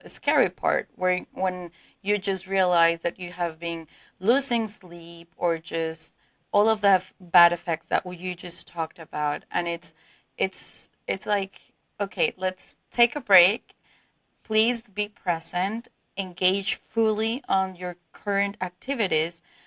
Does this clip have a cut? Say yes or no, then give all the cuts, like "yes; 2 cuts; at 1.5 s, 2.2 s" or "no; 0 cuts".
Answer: no; 0 cuts